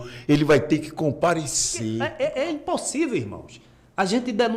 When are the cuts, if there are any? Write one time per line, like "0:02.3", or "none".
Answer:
0:02.0